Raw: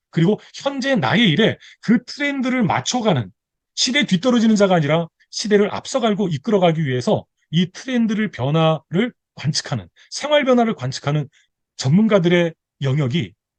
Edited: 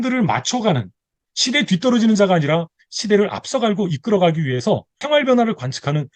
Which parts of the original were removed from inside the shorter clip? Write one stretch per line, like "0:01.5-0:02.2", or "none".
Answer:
0:07.3-0:10.1